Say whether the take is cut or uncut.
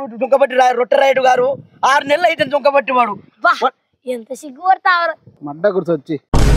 cut